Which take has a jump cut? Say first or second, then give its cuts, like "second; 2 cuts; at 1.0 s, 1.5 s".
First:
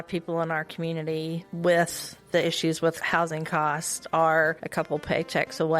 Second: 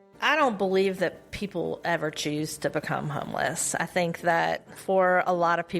first; 3 cuts; at 1.5 s, 3.0 s, 4.6 s